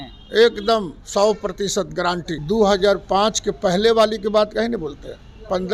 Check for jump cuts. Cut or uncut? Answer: cut